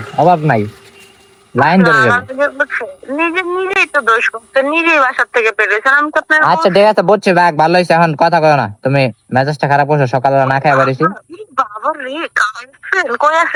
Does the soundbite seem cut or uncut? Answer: uncut